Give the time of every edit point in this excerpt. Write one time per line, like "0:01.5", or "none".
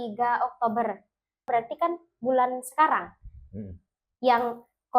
0:01.5